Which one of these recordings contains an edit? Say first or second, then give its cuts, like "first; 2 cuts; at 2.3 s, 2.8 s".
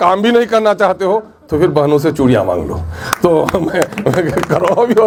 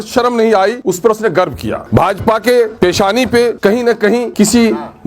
second; 4 cuts; at 0.8 s, 1.8 s, 2.7 s, 3.9 s